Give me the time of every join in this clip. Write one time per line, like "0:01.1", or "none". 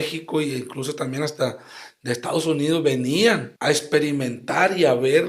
0:03.5